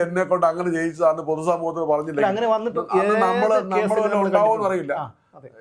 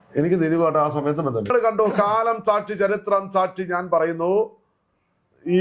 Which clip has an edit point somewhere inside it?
second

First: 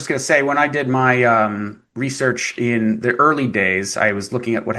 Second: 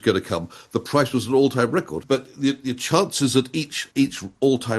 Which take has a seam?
second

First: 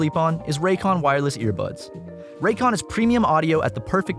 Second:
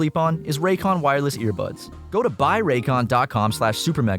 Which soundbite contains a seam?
second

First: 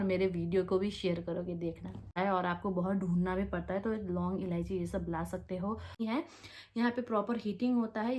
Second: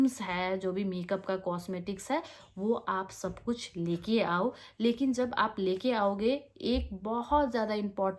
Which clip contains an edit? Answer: first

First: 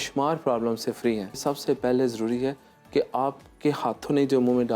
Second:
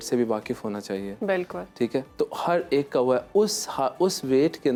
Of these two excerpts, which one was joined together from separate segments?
first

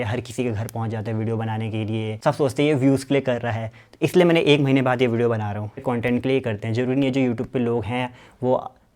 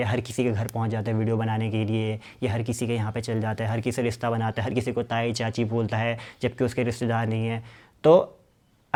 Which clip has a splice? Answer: first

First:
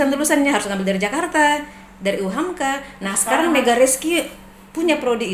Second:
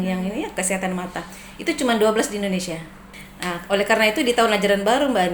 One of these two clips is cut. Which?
second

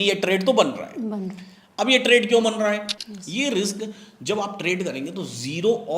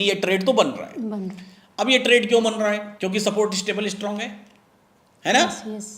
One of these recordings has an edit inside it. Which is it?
first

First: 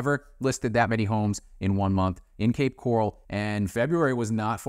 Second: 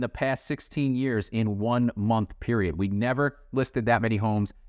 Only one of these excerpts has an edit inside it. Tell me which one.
first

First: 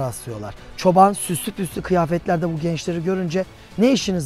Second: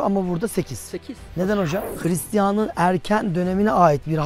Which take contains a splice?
second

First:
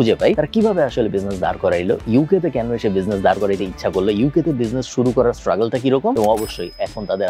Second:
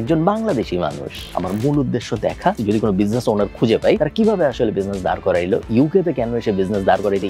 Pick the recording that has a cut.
second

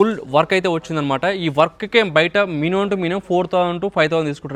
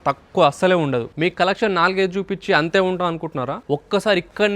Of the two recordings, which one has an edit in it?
second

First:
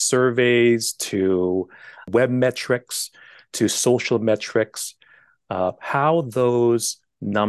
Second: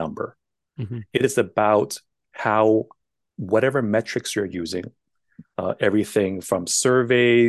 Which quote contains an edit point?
first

